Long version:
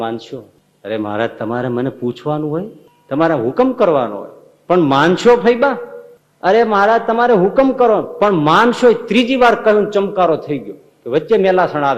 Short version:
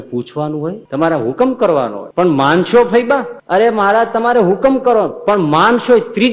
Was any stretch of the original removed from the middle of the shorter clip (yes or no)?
yes